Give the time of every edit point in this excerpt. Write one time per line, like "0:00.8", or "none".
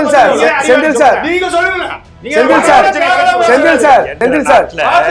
0:04.1